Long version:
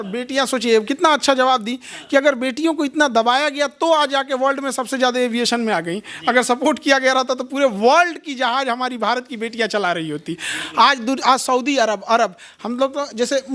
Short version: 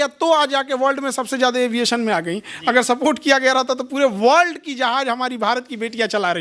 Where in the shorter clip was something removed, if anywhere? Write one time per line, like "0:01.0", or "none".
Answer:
none